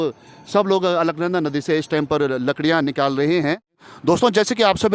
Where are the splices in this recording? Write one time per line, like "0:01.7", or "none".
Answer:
0:03.8